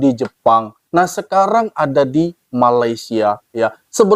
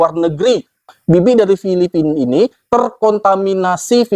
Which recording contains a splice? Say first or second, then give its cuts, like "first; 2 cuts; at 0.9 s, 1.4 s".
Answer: second; 1 cut; at 0.9 s